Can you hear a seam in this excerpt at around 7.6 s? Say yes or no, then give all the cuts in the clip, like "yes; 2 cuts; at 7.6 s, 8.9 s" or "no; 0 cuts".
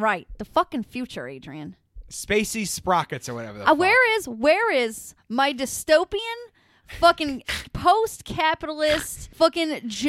no; 1 cut; at 9.2 s